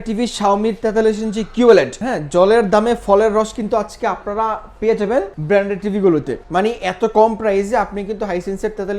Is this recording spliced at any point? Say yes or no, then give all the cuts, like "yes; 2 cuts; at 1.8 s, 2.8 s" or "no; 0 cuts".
yes; 3 cuts; at 2.0 s, 5.3 s, 6.4 s